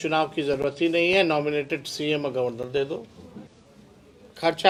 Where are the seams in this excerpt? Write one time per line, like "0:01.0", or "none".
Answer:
none